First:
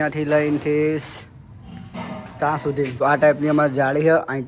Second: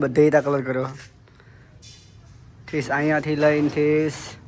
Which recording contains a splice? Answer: first; 1 cut; at 3.0 s

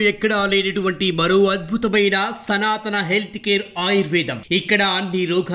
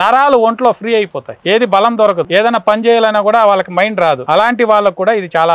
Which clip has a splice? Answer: second; 3 cuts; at 1.3 s, 2.3 s, 4.2 s

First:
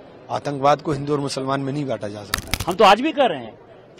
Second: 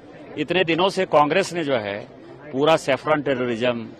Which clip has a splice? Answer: first; 1 cut; at 2.3 s

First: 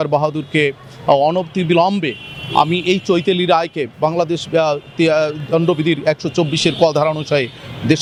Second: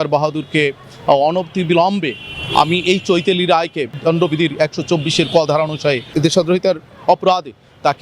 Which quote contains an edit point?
second; 2 cuts; at 3.9 s, 6.1 s

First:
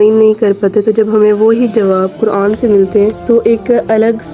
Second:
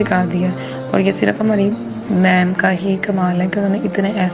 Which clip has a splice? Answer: first; 1 cut; at 3.2 s

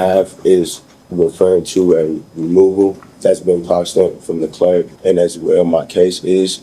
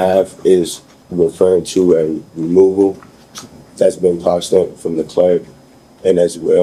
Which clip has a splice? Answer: first; 2 cuts; at 3.1 s, 4.9 s

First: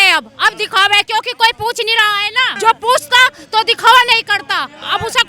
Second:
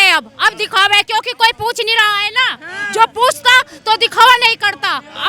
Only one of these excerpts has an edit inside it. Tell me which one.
first; 1 cut; at 2.5 s

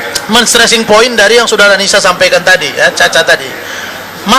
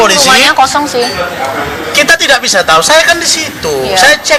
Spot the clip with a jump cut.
first; 1 cut; at 2.2 s

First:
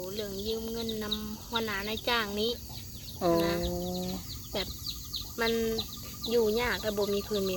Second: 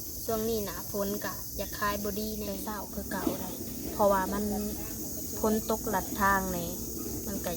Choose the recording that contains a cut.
second; 1 cut; at 2.7 s

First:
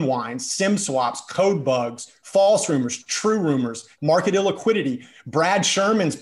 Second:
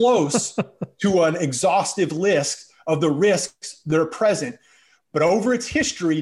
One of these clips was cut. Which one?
first; 2 cuts; at 2.4 s, 3.9 s

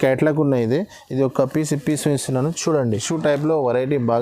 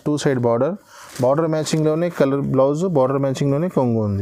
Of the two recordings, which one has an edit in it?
first; 1 cut; at 2.8 s

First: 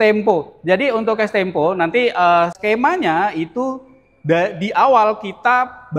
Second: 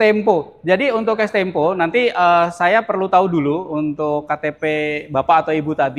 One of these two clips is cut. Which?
first; 1 cut; at 2.5 s

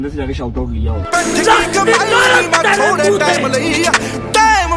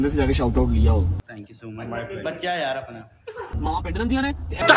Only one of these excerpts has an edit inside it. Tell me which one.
first; 1 cut; at 0.9 s

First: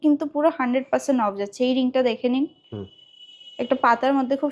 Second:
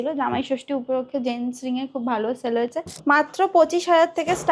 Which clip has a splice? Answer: second; 1 cut; at 2.9 s

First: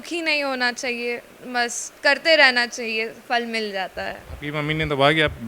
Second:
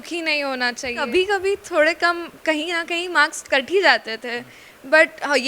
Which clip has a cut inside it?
second; 1 cut; at 0.9 s

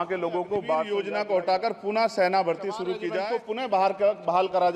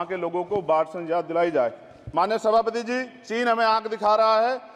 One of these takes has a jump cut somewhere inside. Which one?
first; 2 cuts; at 0.9 s, 3.2 s

